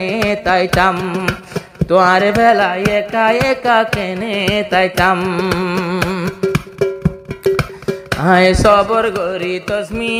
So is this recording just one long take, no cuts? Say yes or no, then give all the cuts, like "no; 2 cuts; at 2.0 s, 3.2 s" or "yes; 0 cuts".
yes; 0 cuts